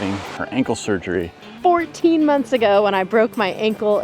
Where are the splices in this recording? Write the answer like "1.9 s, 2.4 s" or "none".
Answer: 1.5 s